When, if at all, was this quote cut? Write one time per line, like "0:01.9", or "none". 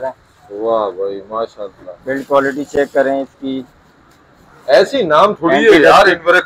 none